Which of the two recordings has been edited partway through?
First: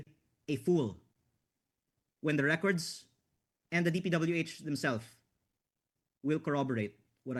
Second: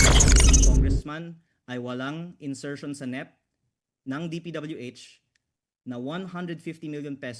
second; 1 cut; at 1.0 s

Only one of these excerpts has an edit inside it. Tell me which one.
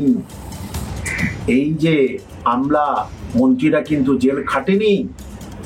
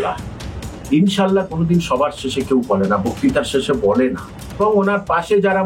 second; 1 cut; at 4.6 s

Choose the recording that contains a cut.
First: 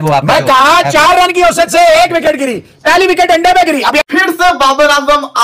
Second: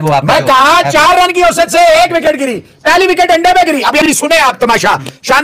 first; 1 cut; at 4.0 s

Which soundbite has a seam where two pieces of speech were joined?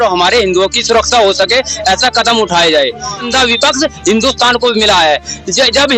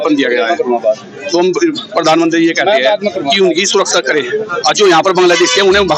first; 1 cut; at 3.3 s

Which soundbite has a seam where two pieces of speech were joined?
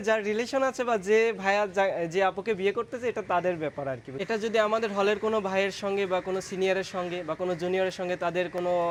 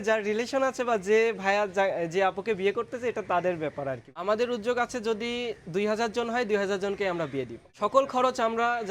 second; 2 cuts; at 4.1 s, 7.6 s

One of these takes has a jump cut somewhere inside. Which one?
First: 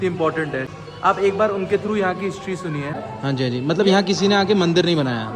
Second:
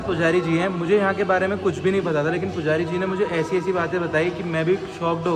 first; 1 cut; at 3.1 s

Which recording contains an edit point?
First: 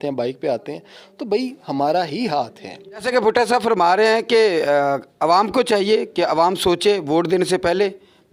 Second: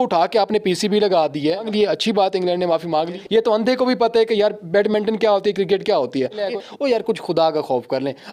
second; 3 cuts; at 1.7 s, 3.2 s, 6.4 s

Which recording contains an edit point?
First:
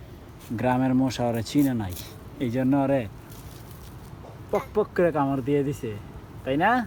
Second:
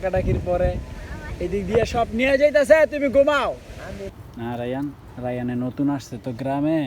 second; 1 cut; at 4.1 s

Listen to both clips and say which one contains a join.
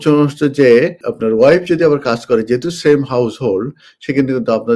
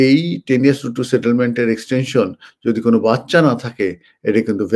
first; 1 cut; at 1.1 s

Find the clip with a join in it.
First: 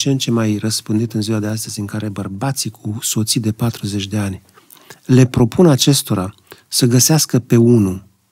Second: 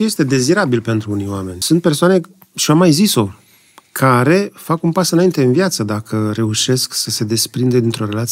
second; 1 cut; at 1.6 s

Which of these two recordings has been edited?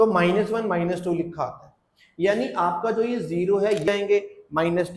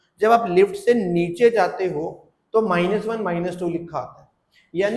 first; 1 cut; at 3.9 s

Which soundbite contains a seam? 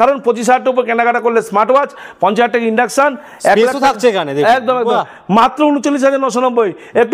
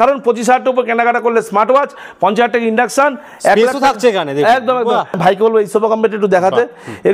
second; 1 cut; at 5.2 s

